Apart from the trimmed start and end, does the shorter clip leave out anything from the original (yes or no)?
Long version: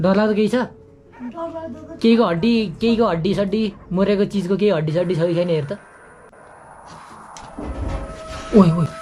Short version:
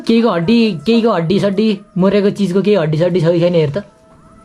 no